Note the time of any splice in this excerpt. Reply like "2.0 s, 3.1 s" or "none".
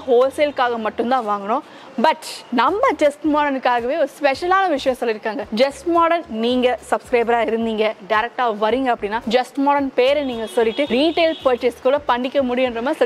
2.3 s, 5.4 s, 9.2 s, 10.9 s